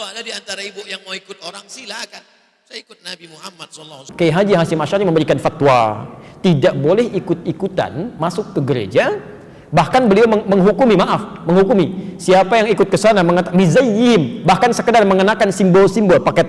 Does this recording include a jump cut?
yes; 1 cut; at 4.0 s

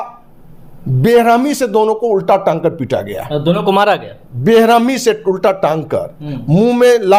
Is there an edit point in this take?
no; 0 cuts

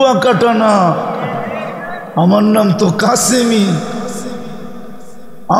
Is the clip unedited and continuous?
yes; 0 cuts

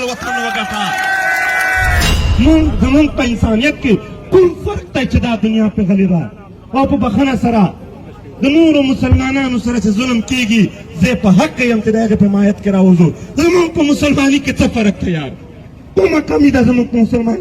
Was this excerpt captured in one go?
no; 1 cut; at 2.2 s

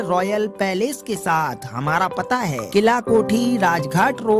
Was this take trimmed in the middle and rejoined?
no; 0 cuts

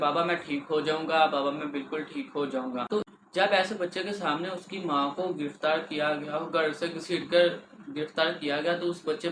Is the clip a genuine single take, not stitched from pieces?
no; 1 cut; at 3.0 s

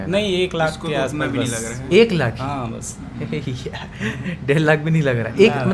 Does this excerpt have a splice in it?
no; 0 cuts

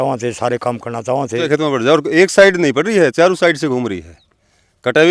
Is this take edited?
yes; 1 cut; at 1.5 s

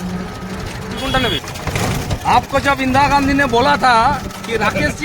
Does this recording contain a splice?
yes; 1 cut; at 1.4 s

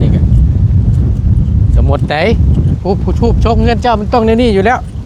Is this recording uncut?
yes; 0 cuts

